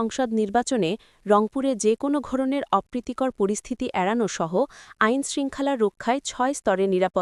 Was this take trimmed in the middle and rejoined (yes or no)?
no